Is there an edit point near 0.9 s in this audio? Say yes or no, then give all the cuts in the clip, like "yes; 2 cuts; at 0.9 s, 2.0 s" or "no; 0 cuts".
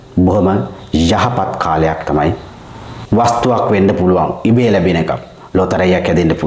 no; 1 cut; at 3.0 s